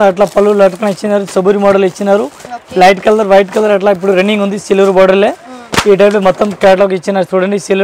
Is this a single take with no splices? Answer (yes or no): yes